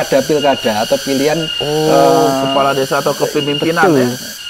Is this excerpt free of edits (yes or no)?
yes